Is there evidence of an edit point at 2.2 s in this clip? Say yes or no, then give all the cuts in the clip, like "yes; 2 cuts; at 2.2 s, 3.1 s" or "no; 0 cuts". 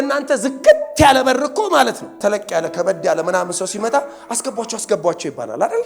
yes; 1 cut; at 2.2 s